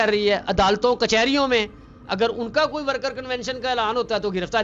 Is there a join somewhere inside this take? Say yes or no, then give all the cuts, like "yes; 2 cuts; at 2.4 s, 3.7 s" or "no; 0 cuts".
no; 0 cuts